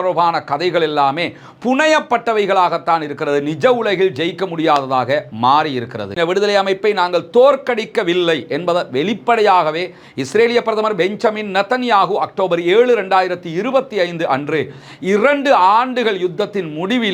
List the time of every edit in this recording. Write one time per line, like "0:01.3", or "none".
0:06.1